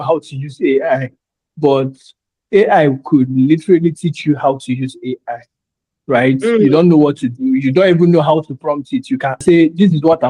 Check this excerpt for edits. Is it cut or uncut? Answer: cut